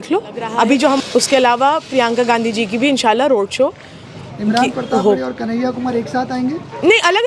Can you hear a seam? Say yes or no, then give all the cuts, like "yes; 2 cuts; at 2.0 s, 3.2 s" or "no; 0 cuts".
yes; 1 cut; at 1.0 s